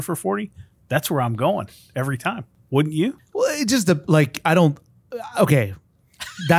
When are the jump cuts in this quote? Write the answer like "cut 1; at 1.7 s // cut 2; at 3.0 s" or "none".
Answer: cut 1; at 2.5 s // cut 2; at 3.2 s